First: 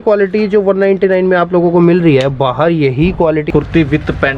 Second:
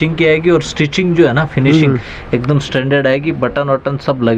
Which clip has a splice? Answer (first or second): first